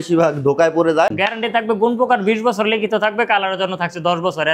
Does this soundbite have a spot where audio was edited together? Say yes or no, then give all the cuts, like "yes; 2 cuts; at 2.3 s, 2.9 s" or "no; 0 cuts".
yes; 1 cut; at 1.2 s